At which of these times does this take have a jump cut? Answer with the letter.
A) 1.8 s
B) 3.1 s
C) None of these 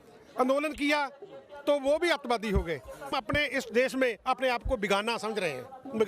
B